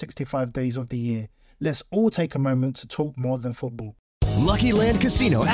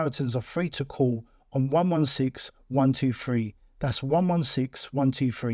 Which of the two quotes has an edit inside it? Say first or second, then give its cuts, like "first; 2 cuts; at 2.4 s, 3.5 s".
first; 1 cut; at 3.9 s